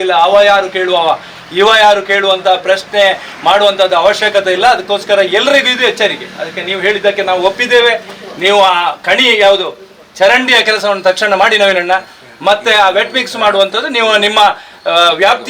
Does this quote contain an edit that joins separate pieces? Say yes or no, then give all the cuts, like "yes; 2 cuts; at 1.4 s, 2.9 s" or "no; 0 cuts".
no; 0 cuts